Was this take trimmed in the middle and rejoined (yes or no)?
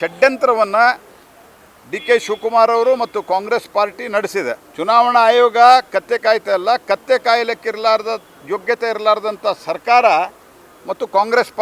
yes